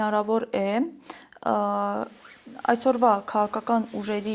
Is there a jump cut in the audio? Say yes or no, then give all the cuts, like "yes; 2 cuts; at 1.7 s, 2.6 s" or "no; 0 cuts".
no; 0 cuts